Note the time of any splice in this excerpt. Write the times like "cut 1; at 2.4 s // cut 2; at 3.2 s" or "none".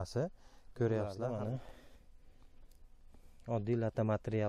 cut 1; at 1.2 s

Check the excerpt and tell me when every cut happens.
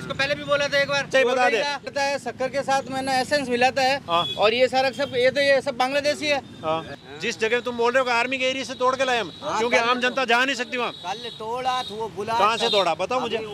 cut 1; at 1.1 s // cut 2; at 1.9 s // cut 3; at 6.9 s

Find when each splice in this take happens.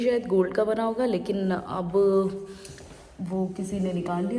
none

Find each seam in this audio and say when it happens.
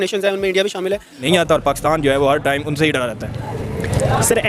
cut 1; at 1.2 s

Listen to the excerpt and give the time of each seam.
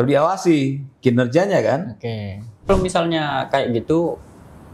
cut 1; at 2.7 s

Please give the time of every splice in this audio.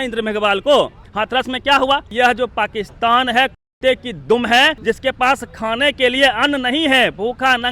cut 1; at 1.0 s // cut 2; at 2.1 s // cut 3; at 4.8 s

